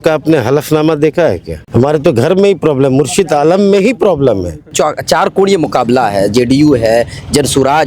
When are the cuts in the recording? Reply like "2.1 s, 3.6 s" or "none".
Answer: 1.5 s, 4.7 s